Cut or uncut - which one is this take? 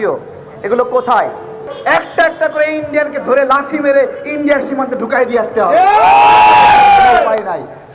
cut